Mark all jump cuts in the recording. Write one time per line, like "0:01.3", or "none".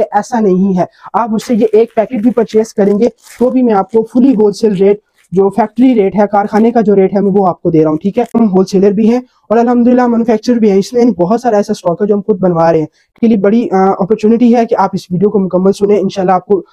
0:08.3
0:13.1